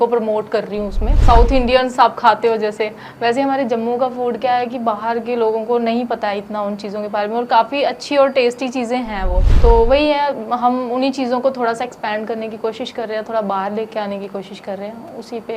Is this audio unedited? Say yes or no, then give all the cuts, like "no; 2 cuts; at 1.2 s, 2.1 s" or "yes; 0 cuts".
no; 2 cuts; at 1.1 s, 9.4 s